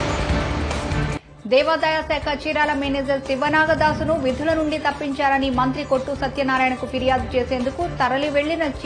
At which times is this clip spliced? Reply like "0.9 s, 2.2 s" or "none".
1.2 s